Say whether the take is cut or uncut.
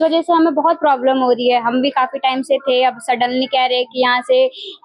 uncut